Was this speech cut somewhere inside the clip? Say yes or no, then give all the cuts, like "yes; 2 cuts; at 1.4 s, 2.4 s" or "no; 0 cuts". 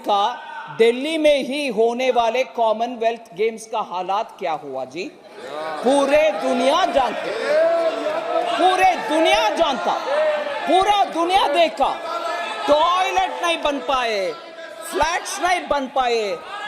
no; 0 cuts